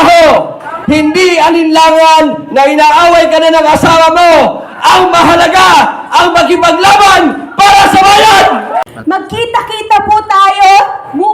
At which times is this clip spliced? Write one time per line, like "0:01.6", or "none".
0:08.8